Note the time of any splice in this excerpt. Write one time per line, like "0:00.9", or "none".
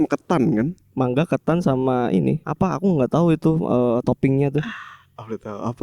0:02.5